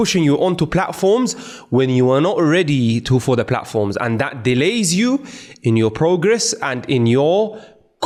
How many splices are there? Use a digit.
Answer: 0